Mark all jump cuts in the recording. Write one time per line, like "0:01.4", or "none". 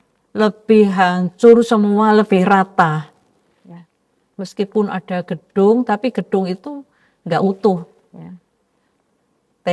none